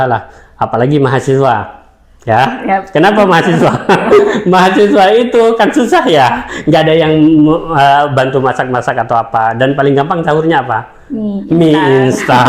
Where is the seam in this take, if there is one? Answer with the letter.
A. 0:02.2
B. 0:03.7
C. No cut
C